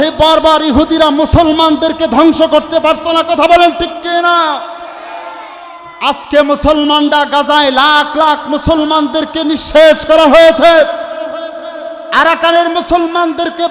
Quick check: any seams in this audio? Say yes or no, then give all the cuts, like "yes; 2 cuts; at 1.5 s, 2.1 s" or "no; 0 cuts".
no; 0 cuts